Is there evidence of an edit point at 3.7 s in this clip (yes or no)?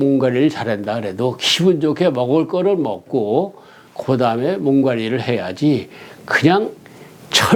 no